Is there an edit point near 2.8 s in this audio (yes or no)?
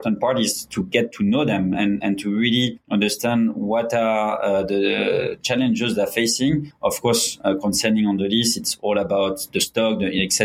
yes